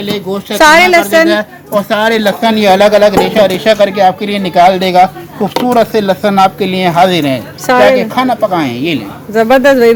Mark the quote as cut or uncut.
uncut